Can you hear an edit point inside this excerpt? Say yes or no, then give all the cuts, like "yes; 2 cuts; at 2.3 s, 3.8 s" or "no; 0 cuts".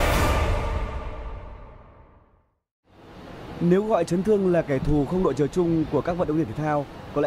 no; 0 cuts